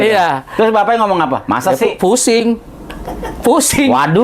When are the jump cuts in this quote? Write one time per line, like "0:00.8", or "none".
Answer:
none